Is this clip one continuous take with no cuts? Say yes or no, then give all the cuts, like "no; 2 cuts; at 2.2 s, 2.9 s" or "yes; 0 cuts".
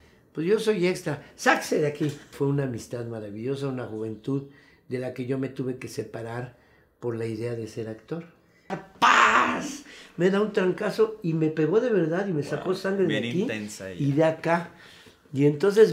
no; 2 cuts; at 2.3 s, 8.8 s